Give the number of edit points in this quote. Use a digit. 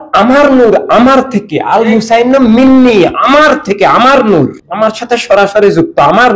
1